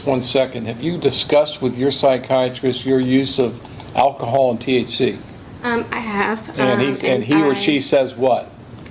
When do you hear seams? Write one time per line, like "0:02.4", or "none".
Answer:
none